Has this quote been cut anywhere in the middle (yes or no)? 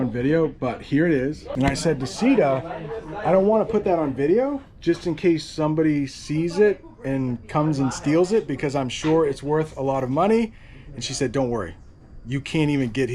yes